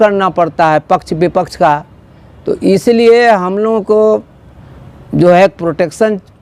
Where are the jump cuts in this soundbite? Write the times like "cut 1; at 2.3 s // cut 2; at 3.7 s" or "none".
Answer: none